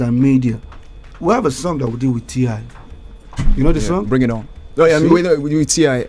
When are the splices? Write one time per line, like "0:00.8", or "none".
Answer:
none